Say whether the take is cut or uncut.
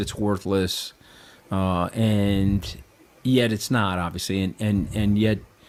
uncut